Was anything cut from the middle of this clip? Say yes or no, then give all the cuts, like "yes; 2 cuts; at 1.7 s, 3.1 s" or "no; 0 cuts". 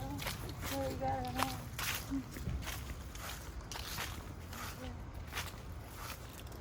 no; 0 cuts